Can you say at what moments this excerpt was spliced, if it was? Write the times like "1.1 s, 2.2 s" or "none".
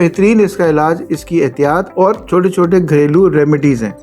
1.9 s